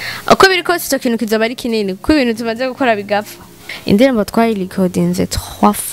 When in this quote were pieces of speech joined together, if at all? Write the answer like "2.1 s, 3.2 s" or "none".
3.7 s